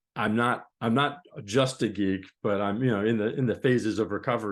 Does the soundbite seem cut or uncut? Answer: uncut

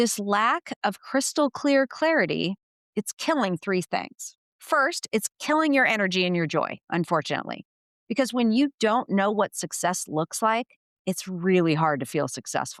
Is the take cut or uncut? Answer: uncut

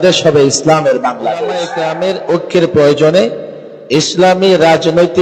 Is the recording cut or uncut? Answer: cut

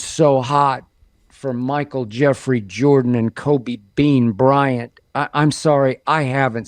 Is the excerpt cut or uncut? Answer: uncut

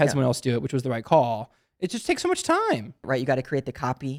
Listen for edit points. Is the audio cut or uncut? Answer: cut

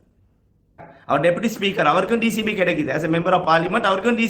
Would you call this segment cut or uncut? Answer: cut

